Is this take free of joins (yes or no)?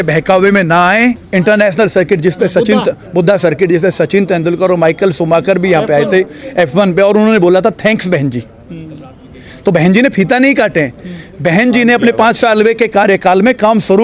no